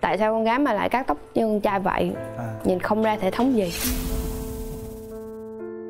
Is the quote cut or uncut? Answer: uncut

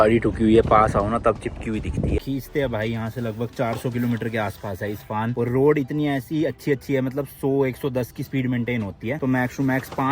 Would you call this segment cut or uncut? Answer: uncut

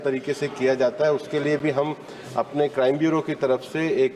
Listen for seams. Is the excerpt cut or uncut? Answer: uncut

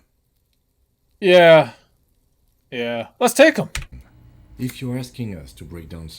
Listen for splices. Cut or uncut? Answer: cut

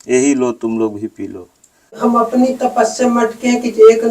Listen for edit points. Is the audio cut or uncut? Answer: cut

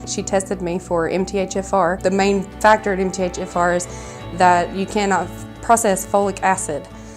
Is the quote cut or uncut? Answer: cut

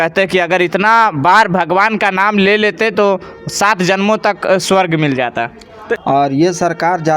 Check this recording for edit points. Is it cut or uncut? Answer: cut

